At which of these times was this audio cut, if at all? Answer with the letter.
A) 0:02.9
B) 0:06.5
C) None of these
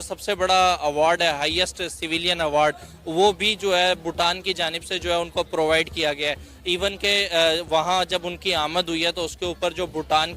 B